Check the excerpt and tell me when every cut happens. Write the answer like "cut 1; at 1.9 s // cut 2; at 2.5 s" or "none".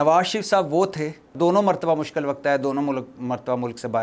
cut 1; at 1.3 s